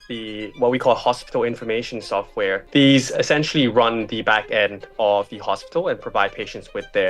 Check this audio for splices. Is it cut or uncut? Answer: cut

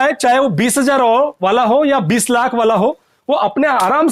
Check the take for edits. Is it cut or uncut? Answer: uncut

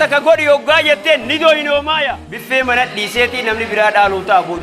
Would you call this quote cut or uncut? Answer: cut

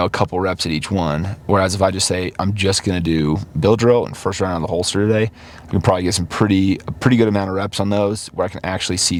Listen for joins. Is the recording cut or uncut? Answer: uncut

